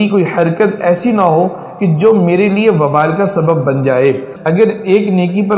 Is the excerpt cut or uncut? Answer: cut